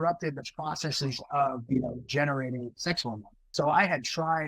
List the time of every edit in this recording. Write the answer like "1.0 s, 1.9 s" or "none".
3.3 s